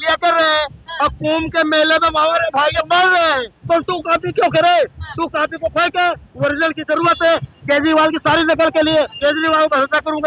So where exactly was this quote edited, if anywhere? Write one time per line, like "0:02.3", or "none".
0:03.5
0:09.1